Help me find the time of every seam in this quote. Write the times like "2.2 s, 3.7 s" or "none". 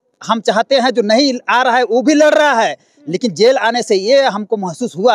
none